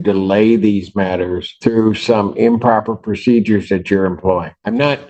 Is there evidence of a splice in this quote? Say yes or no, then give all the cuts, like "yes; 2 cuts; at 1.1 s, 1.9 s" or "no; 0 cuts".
no; 0 cuts